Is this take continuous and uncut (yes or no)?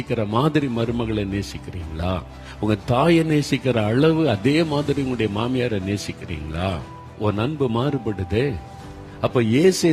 no